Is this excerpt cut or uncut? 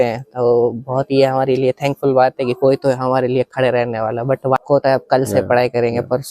cut